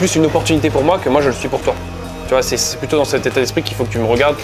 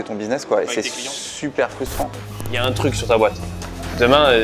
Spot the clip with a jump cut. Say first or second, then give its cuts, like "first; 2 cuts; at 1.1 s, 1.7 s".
second; 1 cut; at 2.2 s